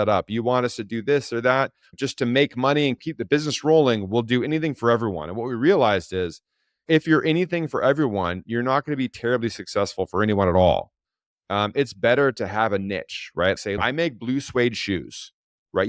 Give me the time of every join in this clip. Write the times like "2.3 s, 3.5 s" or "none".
1.9 s, 3.1 s, 13.8 s